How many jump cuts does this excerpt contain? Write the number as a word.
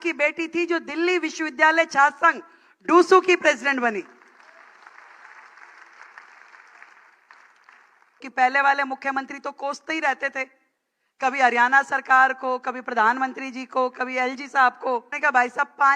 two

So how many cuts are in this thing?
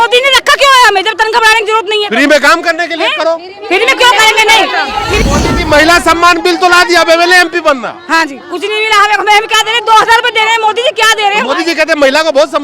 one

